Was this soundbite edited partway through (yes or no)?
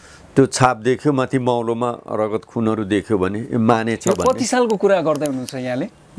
no